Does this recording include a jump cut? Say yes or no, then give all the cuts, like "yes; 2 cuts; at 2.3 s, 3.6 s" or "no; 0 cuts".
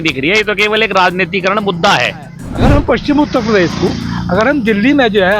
yes; 1 cut; at 2.4 s